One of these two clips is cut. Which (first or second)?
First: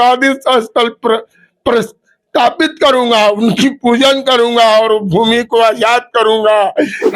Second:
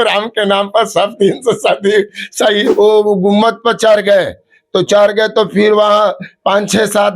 second